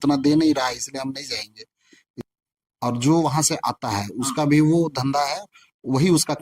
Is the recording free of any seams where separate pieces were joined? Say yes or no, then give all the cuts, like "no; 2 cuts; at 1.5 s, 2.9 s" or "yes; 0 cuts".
no; 1 cut; at 2.1 s